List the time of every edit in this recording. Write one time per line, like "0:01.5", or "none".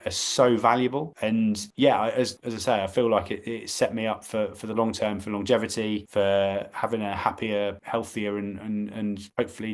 none